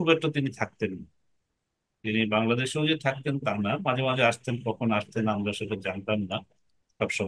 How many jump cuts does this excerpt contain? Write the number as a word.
zero